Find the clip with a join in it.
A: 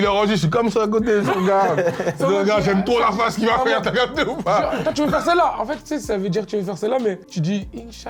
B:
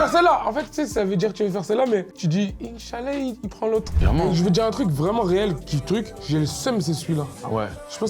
B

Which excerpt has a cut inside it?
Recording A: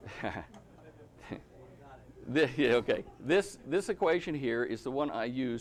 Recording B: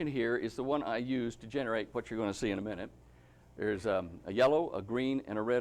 B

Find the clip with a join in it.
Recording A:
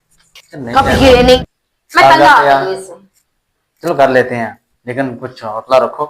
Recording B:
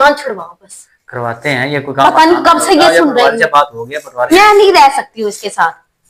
A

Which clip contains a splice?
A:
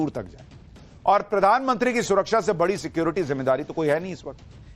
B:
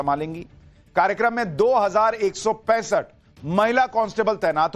B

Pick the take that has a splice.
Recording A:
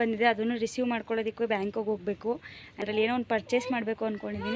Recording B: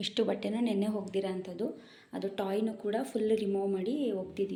A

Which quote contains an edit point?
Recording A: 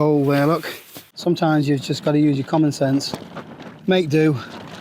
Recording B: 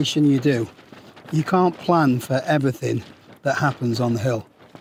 A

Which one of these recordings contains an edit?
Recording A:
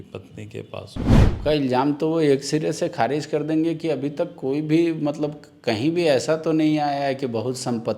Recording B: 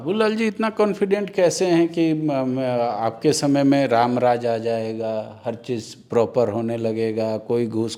A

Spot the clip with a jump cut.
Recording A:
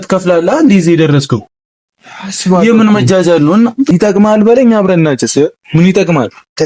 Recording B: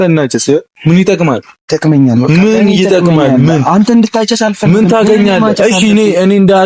A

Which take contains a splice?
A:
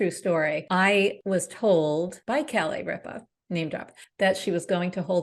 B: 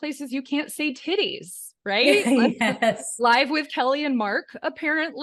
A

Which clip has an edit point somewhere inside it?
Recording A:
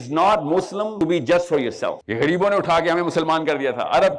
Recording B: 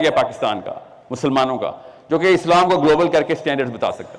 A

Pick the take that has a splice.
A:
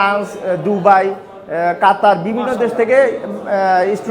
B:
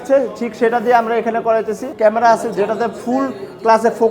B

